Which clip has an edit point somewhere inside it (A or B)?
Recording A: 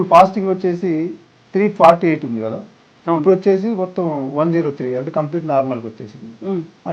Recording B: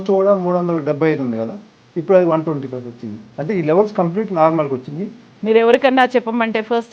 B